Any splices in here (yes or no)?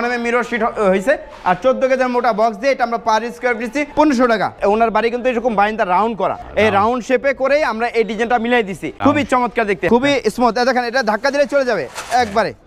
yes